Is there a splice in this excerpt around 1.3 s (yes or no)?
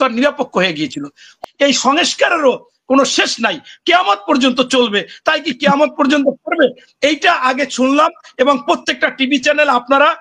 yes